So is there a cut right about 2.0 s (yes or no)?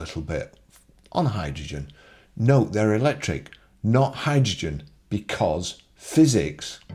no